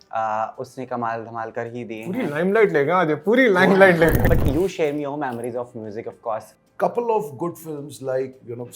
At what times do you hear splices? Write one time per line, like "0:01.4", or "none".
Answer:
0:04.3
0:06.6